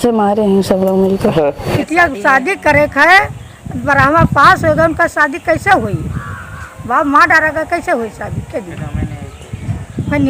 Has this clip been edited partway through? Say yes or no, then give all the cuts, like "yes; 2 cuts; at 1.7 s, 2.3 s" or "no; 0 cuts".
yes; 1 cut; at 1.5 s